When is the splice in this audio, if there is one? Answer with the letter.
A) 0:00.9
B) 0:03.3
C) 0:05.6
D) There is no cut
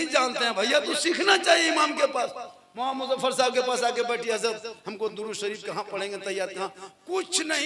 D